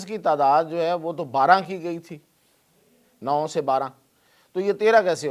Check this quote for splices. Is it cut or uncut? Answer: uncut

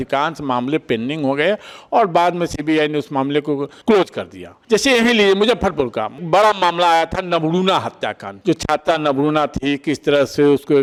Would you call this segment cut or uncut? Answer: uncut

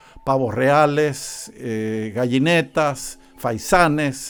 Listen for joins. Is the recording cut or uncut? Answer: uncut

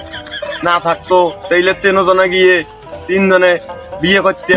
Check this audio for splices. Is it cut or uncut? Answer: uncut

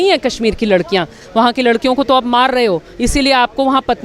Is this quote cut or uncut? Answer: cut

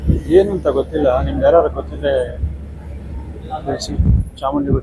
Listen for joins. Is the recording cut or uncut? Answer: uncut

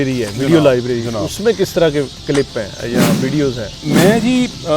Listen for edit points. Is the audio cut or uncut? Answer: cut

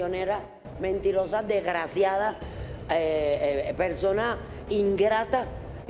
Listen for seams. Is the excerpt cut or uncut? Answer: uncut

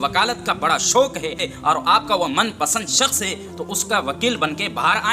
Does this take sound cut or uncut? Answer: cut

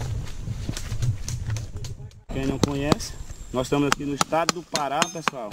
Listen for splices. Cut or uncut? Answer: cut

